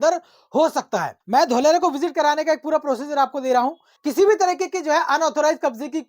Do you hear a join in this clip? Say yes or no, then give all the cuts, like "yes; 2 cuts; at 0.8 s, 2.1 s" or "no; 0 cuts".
yes; 2 cuts; at 1.1 s, 3.9 s